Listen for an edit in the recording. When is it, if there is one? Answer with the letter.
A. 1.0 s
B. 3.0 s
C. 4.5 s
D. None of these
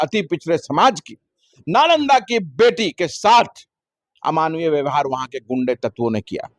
D